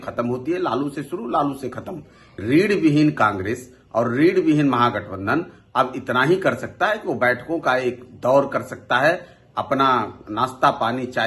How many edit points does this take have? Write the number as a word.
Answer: one